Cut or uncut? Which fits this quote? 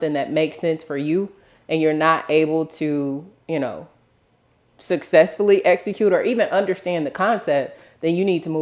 uncut